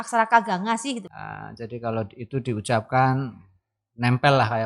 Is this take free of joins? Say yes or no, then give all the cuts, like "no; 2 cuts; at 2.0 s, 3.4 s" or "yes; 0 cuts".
no; 1 cut; at 1.0 s